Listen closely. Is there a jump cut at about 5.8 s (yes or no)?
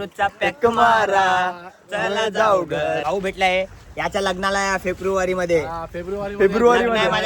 no